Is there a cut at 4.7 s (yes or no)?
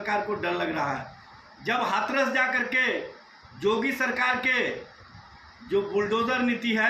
no